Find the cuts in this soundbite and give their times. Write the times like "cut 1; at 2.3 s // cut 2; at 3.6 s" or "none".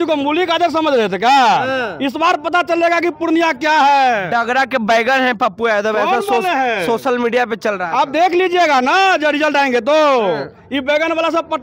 none